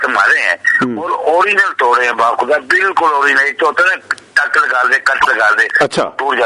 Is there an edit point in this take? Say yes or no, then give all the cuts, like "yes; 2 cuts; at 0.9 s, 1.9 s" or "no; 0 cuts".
no; 0 cuts